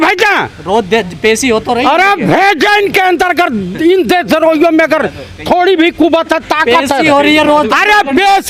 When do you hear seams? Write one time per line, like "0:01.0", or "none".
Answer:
none